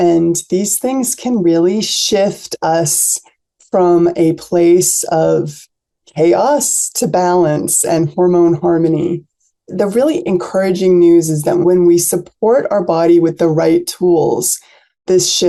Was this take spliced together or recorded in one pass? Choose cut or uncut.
uncut